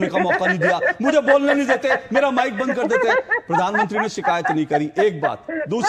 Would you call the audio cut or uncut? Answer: uncut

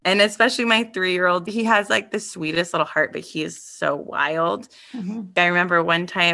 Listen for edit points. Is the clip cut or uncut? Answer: cut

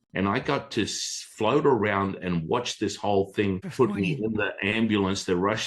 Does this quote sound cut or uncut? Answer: cut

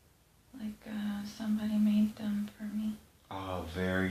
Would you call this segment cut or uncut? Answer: cut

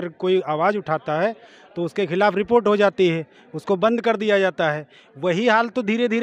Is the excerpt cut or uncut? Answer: uncut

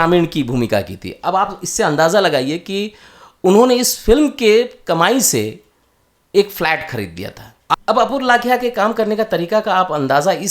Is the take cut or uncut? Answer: cut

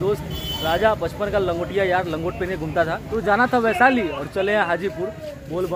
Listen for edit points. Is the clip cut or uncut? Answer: cut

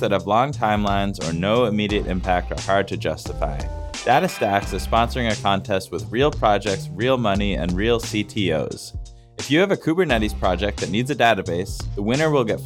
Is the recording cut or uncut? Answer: uncut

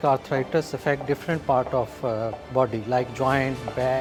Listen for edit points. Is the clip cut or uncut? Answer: uncut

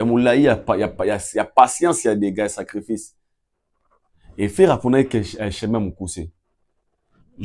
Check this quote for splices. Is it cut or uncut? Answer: uncut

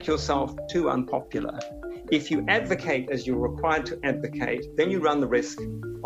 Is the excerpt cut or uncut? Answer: cut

